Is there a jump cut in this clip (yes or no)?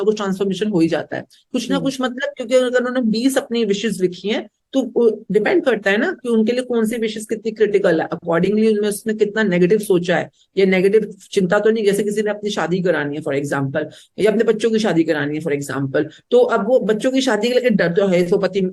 no